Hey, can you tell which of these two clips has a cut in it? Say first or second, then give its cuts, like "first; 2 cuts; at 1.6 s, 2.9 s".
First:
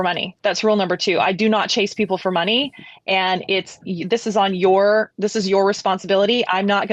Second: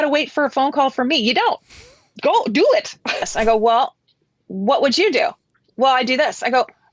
second; 1 cut; at 3.3 s